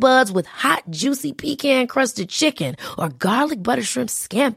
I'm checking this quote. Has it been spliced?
no; 0 cuts

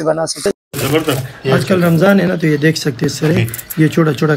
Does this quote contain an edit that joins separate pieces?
yes; 1 cut; at 1.2 s

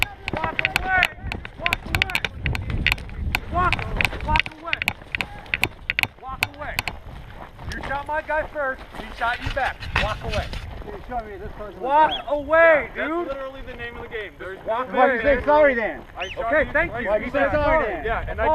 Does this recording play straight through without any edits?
no; 1 cut; at 2.9 s

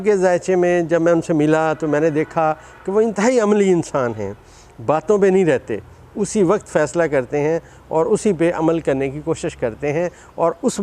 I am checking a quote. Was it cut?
no; 0 cuts

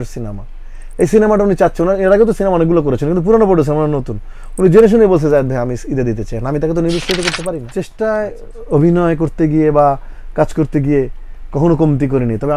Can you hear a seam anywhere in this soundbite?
yes; 1 cut; at 7.7 s

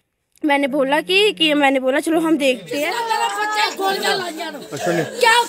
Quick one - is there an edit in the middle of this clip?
yes; 1 cut; at 2.9 s

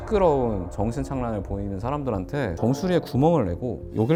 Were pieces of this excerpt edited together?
no; 0 cuts

